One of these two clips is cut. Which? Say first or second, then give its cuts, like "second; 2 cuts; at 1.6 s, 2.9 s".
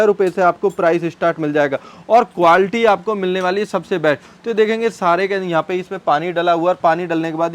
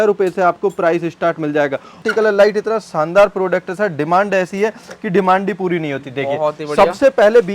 second; 1 cut; at 2.0 s